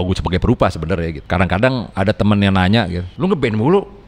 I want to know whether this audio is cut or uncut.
cut